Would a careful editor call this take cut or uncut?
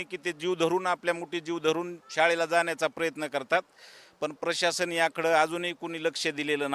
uncut